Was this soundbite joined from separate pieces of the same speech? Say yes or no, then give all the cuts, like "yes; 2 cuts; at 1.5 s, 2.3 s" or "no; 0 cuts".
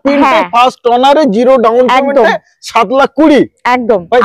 no; 0 cuts